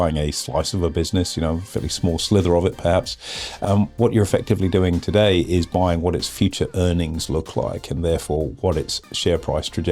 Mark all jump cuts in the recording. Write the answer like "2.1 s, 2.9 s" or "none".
3.6 s